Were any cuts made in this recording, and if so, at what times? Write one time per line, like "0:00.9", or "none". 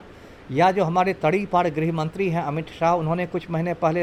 none